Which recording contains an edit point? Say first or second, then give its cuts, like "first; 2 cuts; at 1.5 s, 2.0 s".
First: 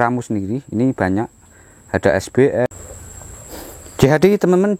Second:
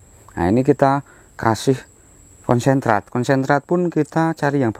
first; 1 cut; at 2.7 s